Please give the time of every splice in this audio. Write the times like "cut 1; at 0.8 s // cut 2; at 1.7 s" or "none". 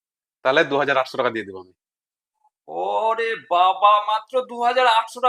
none